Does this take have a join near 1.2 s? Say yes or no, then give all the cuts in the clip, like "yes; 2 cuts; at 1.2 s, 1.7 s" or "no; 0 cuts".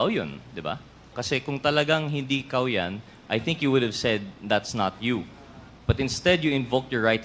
yes; 1 cut; at 1.2 s